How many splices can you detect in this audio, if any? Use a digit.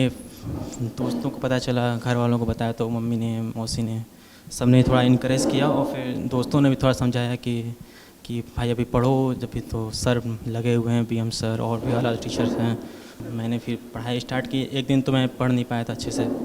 1